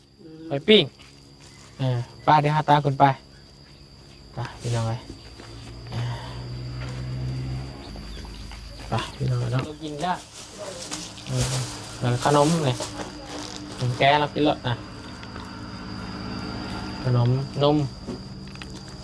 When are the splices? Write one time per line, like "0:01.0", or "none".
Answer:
0:09.8